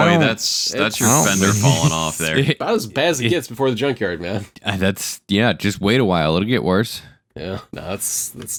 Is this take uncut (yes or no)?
yes